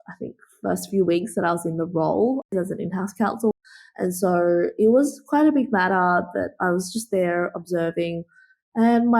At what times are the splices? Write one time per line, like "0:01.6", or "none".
0:02.5
0:03.5